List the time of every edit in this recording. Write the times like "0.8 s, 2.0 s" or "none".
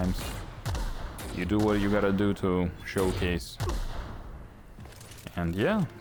none